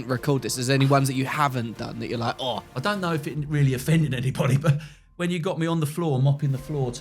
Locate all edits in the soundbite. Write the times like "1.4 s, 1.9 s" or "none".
2.7 s